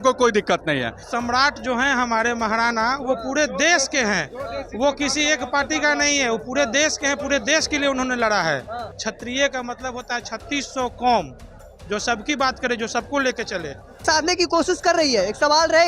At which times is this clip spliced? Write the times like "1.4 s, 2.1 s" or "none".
1.0 s, 8.9 s, 14.0 s